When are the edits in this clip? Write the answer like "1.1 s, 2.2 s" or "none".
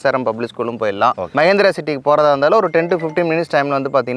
1.3 s